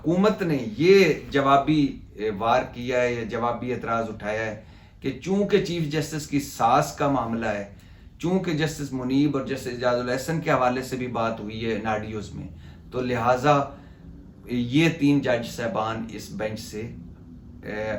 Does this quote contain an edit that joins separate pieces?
no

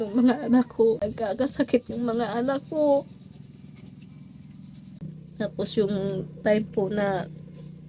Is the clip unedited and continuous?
no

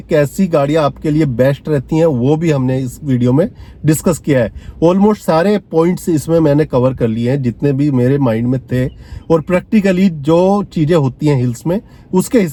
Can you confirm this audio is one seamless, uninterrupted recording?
yes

